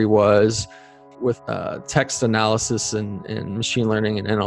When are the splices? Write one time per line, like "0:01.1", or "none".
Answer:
0:01.0